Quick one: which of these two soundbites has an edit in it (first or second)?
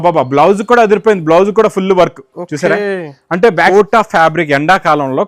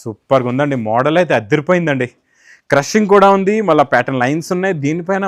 first